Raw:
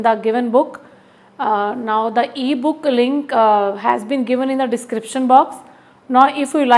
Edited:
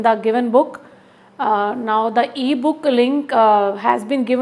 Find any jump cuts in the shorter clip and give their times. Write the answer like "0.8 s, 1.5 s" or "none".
none